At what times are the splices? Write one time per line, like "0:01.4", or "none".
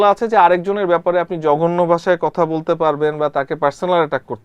none